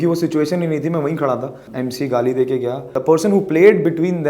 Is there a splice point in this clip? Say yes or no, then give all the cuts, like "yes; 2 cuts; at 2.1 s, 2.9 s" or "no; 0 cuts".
yes; 2 cuts; at 1.7 s, 3.0 s